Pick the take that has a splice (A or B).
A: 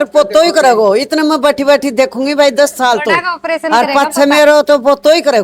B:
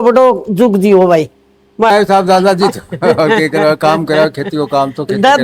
B